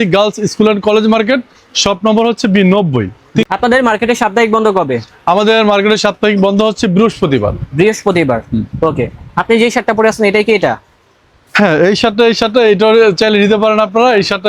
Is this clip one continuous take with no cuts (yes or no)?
yes